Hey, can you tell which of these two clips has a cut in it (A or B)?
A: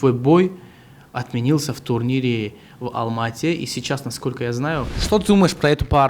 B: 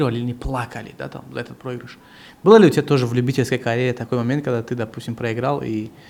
A